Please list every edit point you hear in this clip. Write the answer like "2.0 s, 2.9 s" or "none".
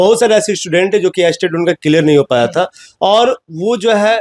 none